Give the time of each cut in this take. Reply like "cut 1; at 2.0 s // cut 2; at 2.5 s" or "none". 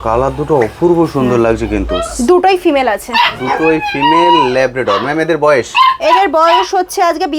none